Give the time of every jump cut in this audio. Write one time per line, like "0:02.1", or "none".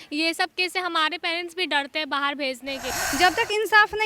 0:03.0